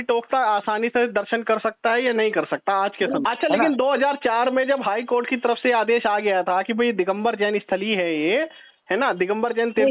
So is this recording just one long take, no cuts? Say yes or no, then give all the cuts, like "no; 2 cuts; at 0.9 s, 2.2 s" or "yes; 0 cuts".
no; 1 cut; at 3.2 s